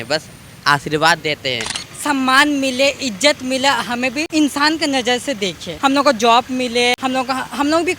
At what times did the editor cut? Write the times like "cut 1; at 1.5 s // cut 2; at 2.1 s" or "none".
cut 1; at 1.7 s // cut 2; at 4.2 s // cut 3; at 5.7 s // cut 4; at 7.0 s